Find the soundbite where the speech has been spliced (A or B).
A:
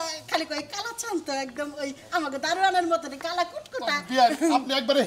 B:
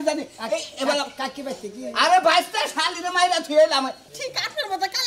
B